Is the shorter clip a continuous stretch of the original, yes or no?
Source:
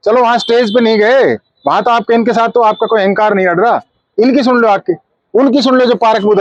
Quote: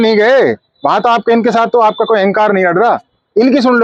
yes